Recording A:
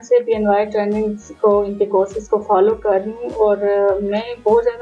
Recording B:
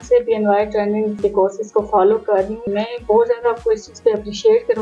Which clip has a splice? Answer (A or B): B